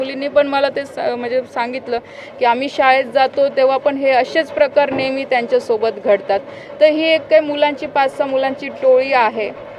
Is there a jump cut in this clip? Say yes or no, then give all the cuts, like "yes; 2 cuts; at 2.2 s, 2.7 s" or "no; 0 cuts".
no; 0 cuts